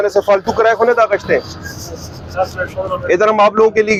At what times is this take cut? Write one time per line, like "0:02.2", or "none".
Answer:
none